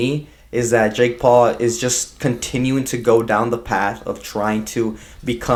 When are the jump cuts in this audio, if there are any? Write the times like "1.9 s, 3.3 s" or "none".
none